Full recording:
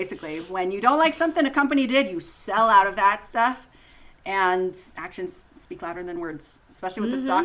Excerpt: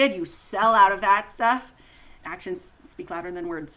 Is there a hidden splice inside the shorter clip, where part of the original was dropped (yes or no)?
yes